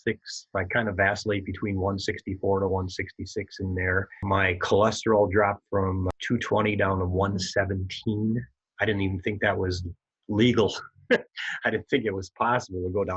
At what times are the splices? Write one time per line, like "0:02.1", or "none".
none